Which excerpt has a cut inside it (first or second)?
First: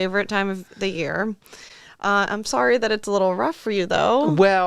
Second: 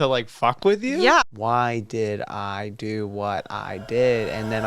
second